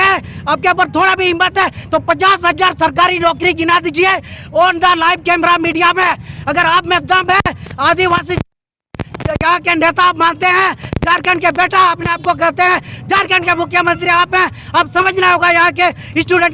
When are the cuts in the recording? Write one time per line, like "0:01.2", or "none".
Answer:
none